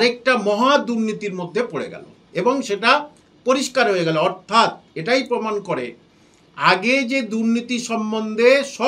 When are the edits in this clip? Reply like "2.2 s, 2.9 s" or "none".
none